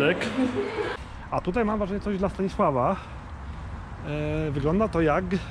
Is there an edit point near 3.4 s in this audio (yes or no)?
no